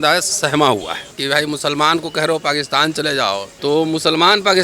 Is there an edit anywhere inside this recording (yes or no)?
yes